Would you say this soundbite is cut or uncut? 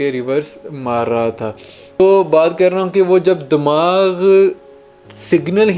cut